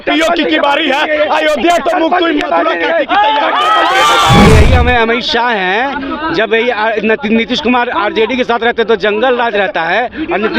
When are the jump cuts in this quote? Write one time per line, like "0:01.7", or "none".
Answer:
0:04.5